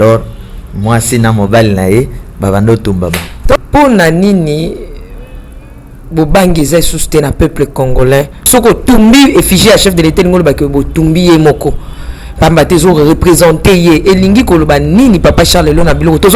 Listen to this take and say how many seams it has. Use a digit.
1